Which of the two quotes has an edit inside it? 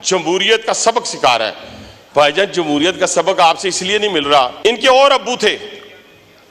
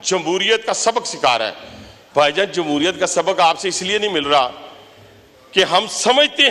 first; 1 cut; at 4.5 s

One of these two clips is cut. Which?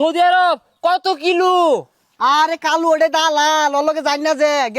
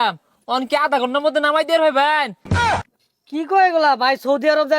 second; 1 cut; at 2.8 s

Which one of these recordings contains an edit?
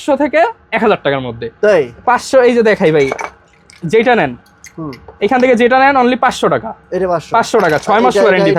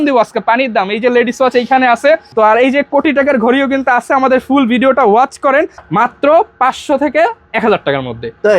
second; 2 cuts; at 2.3 s, 5.8 s

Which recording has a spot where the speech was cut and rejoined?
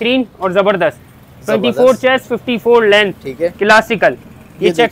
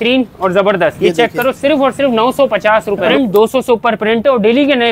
second; 2 cuts; at 1.0 s, 3.0 s

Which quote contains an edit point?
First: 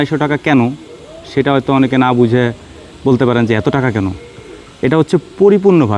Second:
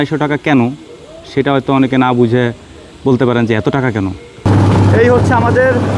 second; 1 cut; at 4.4 s

